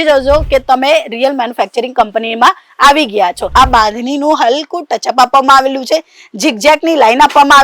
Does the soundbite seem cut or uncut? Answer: cut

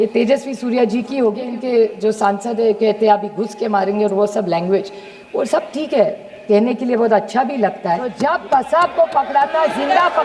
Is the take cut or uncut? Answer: cut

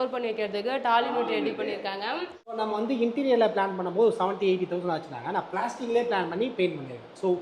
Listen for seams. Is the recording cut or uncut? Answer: cut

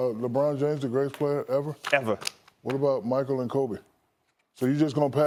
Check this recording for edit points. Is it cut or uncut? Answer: uncut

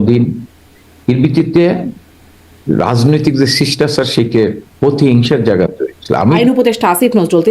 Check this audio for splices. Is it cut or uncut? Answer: cut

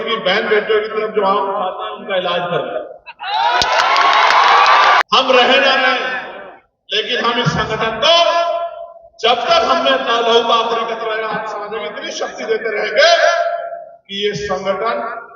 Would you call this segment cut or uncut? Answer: cut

